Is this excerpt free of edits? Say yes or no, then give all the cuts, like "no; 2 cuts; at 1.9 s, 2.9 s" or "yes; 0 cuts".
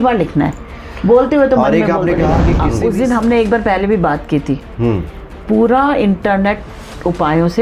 no; 1 cut; at 2.6 s